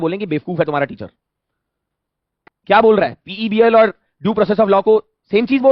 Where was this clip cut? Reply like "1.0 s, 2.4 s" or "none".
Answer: none